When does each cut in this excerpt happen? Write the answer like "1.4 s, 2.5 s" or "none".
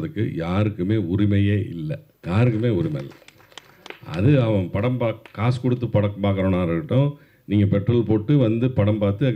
2.1 s